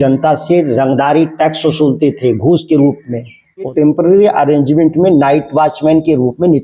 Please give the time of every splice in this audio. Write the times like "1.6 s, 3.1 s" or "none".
3.7 s

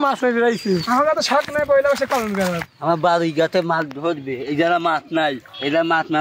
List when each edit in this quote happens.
0.8 s, 2.7 s

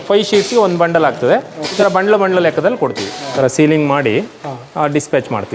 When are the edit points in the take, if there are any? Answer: 1.6 s, 3.3 s

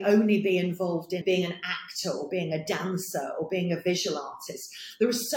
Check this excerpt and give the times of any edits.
1.2 s

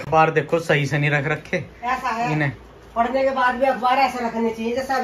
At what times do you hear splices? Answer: none

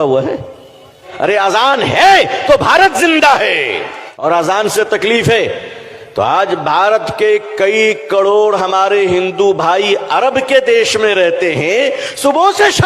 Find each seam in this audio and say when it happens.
1.0 s, 4.2 s

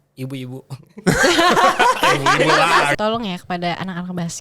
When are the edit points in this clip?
2.9 s

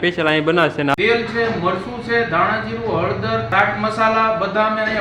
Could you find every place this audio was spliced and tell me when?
0.9 s, 3.5 s

